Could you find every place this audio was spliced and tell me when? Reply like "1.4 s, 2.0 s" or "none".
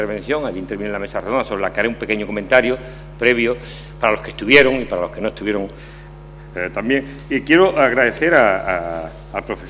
2.8 s